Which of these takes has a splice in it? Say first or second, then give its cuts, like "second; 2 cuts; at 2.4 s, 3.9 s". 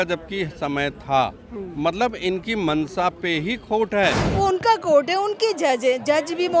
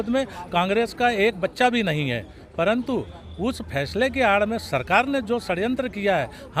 first; 1 cut; at 4.4 s